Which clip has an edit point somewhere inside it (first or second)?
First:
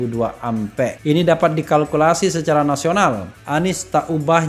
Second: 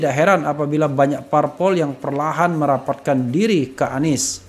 first